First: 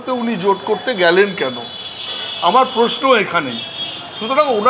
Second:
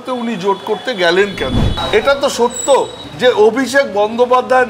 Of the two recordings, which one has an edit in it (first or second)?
second